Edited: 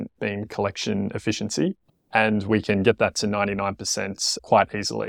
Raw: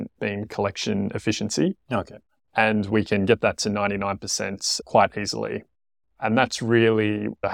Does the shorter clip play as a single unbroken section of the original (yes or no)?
no